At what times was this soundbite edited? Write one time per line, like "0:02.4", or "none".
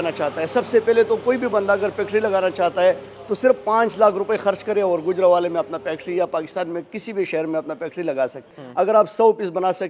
0:08.5